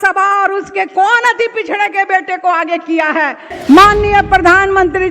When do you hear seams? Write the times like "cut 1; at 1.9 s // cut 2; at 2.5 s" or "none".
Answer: cut 1; at 3.5 s